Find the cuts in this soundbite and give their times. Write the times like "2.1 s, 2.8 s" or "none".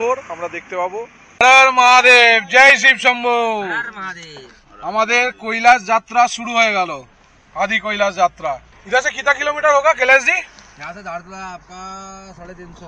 1.3 s, 8.7 s